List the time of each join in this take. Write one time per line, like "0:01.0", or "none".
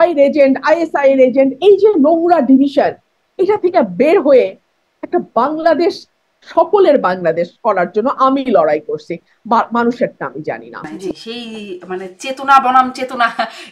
0:11.1

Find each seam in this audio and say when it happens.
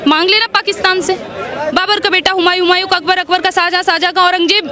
0:01.7

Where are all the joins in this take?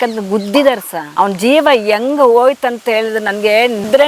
none

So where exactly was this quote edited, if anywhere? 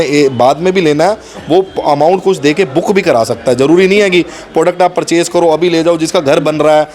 none

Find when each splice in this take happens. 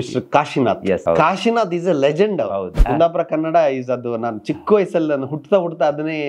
0:01.0
0:02.8

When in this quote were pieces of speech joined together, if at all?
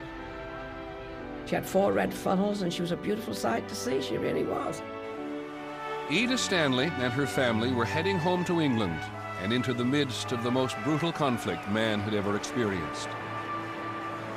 0:06.4

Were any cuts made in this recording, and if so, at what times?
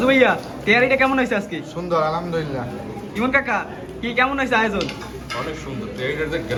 none

